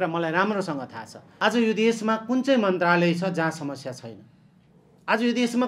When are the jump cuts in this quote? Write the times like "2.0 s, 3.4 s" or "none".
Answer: 1.2 s